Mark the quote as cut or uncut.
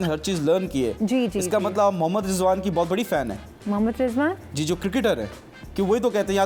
uncut